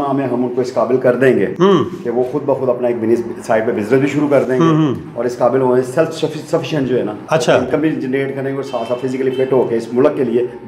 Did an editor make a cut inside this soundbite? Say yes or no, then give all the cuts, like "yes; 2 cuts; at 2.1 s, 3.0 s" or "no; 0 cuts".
no; 0 cuts